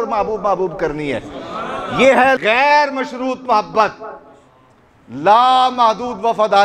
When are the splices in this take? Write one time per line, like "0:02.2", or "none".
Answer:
none